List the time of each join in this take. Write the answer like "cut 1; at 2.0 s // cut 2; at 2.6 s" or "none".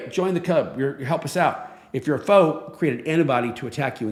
none